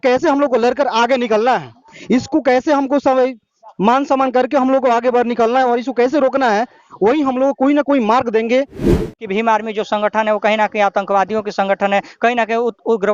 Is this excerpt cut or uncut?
cut